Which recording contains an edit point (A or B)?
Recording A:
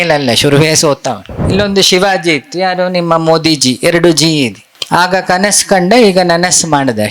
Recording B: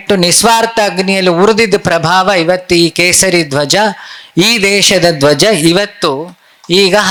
A